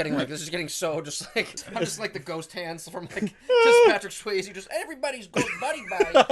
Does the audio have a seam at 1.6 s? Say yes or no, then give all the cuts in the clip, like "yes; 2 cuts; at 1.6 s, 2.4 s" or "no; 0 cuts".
yes; 1 cut; at 1.6 s